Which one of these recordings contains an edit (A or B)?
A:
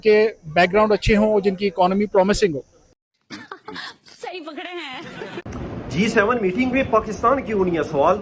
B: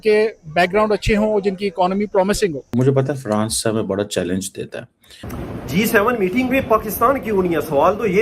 B